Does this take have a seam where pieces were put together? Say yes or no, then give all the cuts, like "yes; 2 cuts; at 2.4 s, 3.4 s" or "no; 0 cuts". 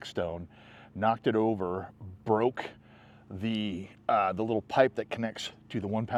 no; 0 cuts